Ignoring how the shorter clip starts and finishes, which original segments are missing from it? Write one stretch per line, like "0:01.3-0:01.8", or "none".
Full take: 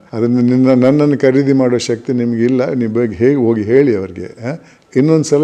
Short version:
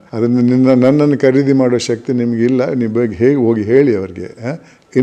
none